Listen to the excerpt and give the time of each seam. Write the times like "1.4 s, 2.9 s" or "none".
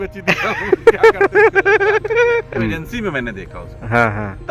2.6 s